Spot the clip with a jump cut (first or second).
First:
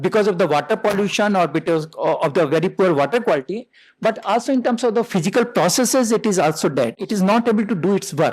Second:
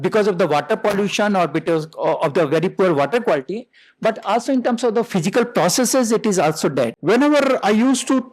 second